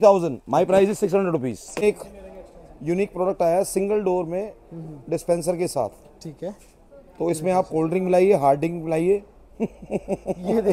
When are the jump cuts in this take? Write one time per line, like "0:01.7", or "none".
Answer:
0:01.8